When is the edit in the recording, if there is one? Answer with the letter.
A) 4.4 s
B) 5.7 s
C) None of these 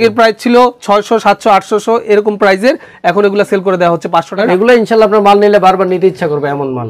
A